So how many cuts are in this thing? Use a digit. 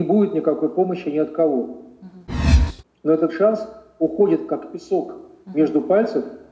1